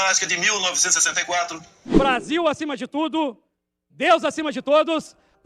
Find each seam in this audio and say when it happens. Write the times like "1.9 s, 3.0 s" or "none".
1.7 s